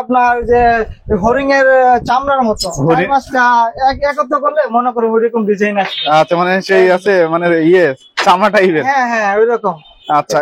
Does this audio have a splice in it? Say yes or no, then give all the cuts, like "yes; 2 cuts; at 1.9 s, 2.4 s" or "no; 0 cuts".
no; 0 cuts